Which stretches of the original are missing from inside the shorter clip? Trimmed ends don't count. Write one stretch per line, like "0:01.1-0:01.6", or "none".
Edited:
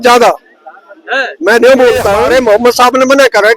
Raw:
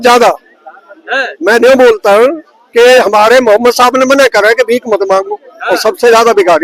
0:02.3-0:03.3